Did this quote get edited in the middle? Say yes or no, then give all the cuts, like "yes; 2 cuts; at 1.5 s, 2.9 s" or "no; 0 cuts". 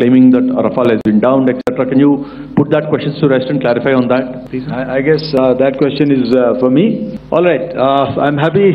yes; 2 cuts; at 4.4 s, 7.1 s